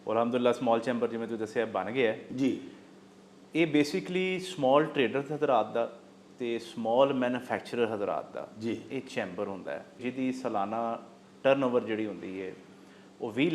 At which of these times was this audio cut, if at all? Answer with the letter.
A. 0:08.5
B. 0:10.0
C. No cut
B